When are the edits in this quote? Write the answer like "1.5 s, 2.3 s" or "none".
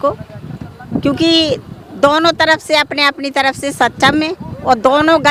none